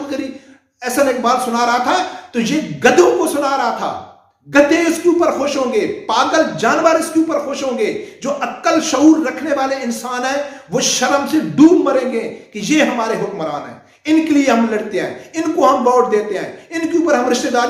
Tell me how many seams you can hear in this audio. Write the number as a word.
zero